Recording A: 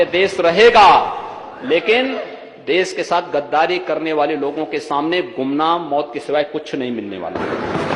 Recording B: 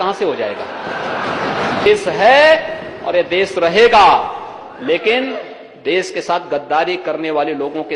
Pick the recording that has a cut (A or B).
B